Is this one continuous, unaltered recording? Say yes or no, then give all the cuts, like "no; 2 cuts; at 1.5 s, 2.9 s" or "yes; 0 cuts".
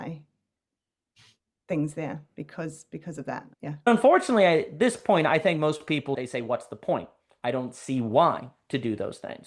no; 2 cuts; at 3.9 s, 6.2 s